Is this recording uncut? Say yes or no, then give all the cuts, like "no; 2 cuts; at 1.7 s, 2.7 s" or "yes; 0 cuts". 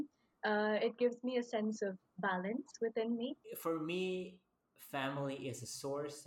no; 1 cut; at 3.5 s